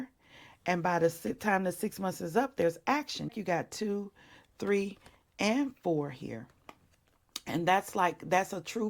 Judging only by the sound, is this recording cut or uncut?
cut